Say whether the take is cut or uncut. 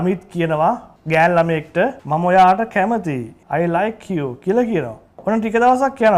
cut